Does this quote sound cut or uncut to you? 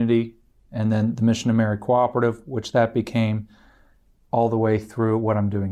uncut